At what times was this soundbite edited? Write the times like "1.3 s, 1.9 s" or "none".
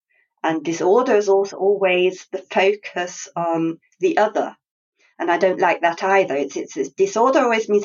none